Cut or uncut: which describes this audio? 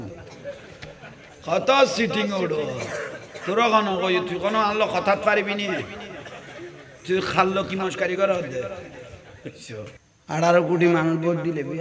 cut